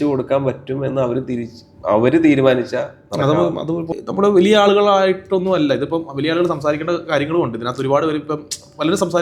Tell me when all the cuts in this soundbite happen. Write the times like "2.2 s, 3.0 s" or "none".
3.9 s